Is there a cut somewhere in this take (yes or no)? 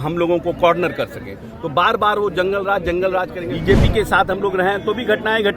yes